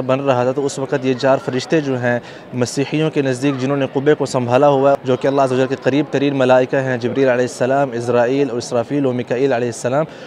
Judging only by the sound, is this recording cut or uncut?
cut